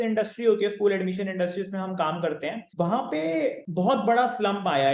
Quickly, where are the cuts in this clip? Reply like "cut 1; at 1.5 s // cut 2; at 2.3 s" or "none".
cut 1; at 2.6 s // cut 2; at 3.6 s